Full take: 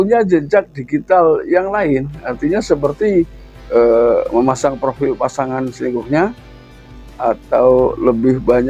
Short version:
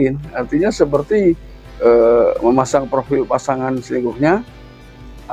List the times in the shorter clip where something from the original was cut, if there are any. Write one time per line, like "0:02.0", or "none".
none